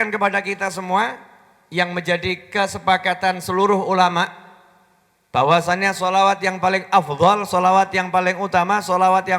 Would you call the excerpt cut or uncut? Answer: uncut